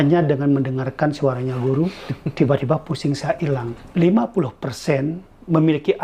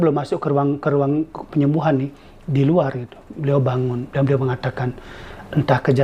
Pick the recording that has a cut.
first; 1 cut; at 3.8 s

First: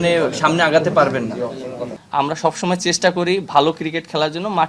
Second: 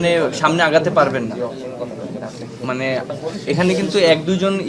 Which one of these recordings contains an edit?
first; 1 cut; at 2.0 s

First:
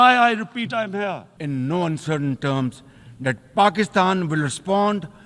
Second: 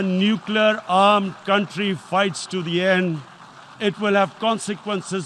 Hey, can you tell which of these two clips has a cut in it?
first; 1 cut; at 1.3 s

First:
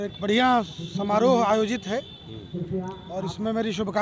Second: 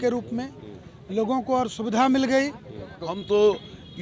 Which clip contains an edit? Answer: second; 1 cut; at 3.1 s

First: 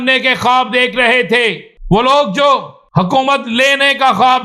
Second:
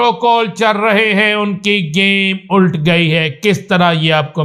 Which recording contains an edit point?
first; 2 cuts; at 1.7 s, 2.8 s

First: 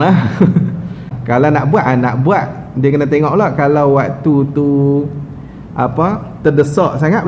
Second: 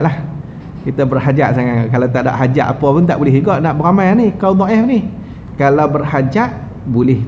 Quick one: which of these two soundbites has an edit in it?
first; 1 cut; at 1.1 s

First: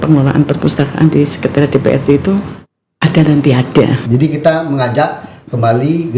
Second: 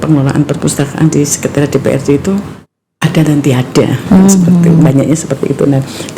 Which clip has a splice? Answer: first; 1 cut; at 4.0 s

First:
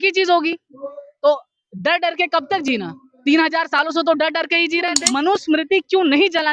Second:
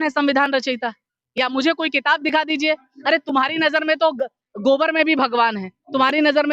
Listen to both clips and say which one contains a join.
first; 1 cut; at 5.0 s

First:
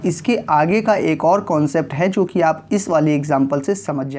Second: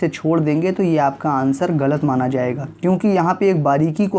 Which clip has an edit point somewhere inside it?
second; 1 cut; at 2.6 s

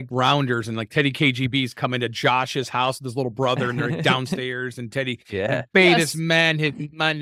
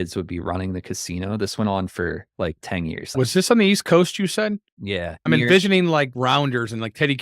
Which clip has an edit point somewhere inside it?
second; 2 cuts; at 3.1 s, 5.1 s

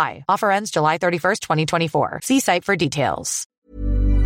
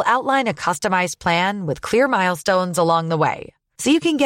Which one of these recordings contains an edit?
first; 1 cut; at 3.3 s

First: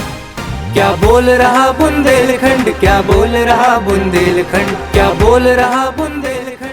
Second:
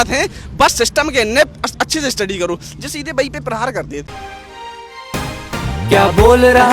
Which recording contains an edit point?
second; 1 cut; at 4.1 s

